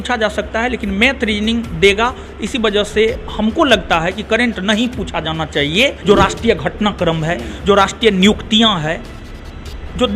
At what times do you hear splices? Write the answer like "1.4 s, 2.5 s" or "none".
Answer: 6.0 s